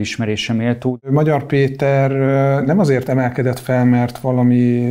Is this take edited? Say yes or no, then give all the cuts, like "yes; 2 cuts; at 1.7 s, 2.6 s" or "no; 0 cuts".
yes; 1 cut; at 1.1 s